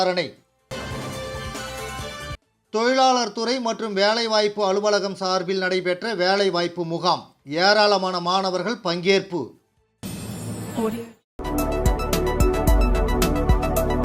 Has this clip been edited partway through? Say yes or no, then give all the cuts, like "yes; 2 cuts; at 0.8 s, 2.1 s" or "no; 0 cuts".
yes; 1 cut; at 11.4 s